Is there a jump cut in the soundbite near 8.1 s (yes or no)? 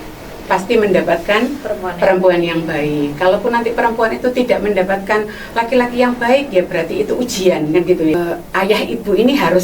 yes